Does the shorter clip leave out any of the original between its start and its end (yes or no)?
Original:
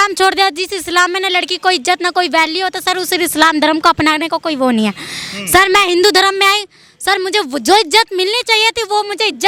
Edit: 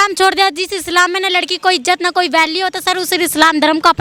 no